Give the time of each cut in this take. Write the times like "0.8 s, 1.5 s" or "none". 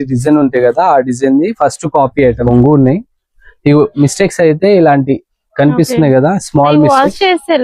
2.5 s